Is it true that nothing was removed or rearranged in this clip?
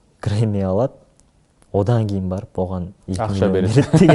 yes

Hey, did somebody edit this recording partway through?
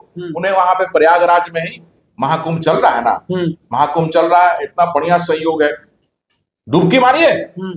no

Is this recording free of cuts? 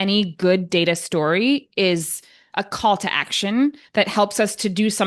yes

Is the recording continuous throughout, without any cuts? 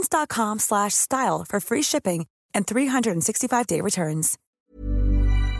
no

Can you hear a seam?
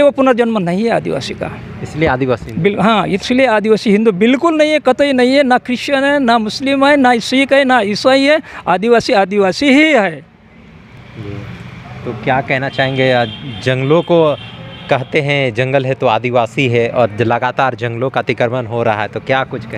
no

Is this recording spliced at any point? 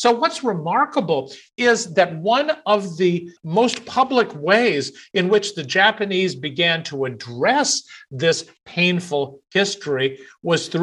yes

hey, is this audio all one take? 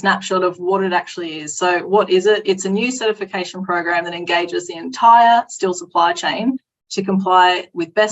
yes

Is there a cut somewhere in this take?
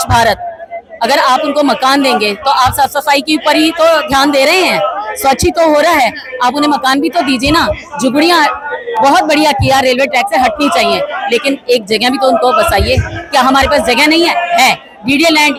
no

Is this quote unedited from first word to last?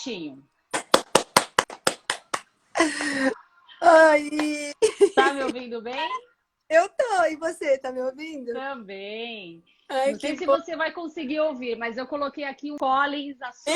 no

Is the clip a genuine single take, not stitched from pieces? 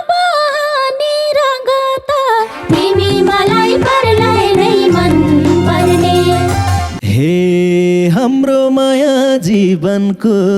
no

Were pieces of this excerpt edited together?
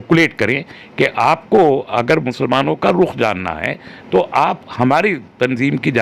no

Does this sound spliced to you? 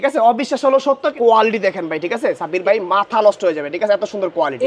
yes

